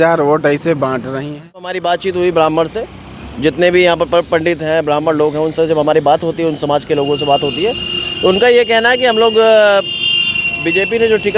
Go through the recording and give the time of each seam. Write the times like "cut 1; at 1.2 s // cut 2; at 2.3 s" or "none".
cut 1; at 1.7 s